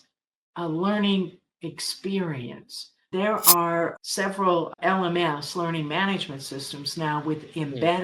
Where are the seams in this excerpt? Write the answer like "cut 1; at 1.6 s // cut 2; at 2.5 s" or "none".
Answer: cut 1; at 3.0 s // cut 2; at 4.0 s // cut 3; at 4.7 s

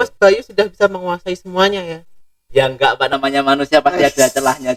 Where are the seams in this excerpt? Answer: none

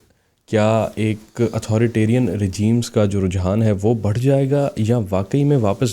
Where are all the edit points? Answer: none

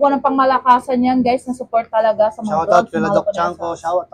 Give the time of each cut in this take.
none

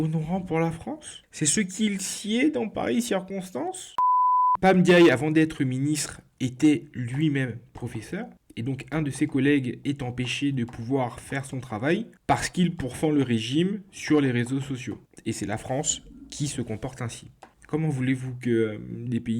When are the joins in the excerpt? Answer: cut 1; at 4.1 s

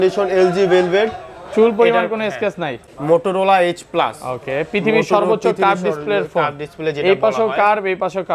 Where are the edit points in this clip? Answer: cut 1; at 2.9 s

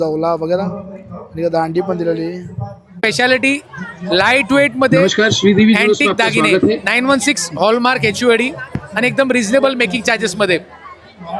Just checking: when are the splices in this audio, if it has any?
cut 1; at 3.0 s

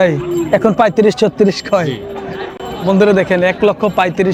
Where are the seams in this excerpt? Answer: none

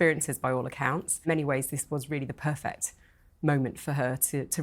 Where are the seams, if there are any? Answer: cut 1; at 1.2 s

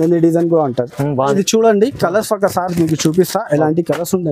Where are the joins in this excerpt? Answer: cut 1; at 1.2 s

